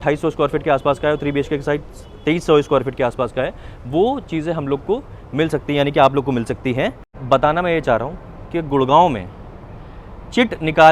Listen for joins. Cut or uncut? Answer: cut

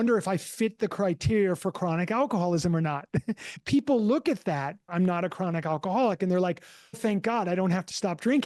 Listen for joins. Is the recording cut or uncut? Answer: cut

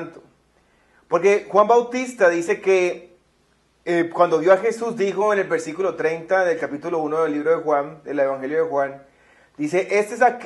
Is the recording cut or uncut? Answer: uncut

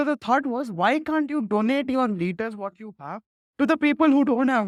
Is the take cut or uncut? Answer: uncut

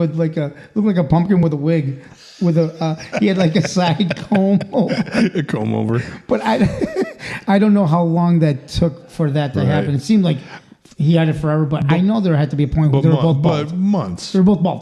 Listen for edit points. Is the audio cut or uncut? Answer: uncut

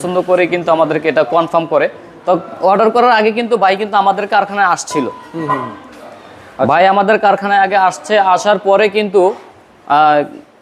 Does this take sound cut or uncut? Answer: uncut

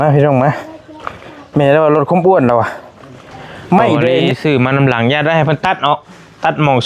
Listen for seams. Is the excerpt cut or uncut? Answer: cut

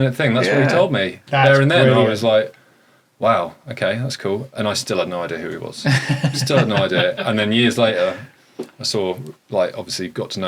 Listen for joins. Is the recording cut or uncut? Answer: uncut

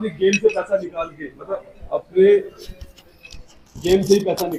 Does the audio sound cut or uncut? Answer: uncut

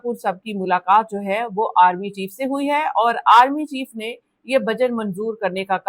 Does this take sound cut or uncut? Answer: uncut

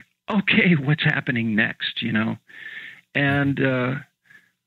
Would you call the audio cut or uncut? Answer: uncut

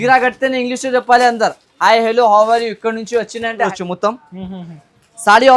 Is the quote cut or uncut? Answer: cut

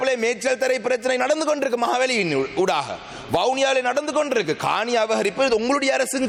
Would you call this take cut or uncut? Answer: uncut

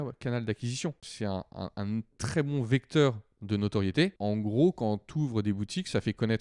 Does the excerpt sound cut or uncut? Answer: cut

